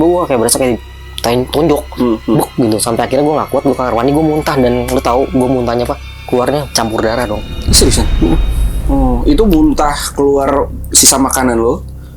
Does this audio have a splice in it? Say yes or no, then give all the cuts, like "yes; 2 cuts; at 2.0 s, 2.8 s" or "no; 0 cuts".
no; 0 cuts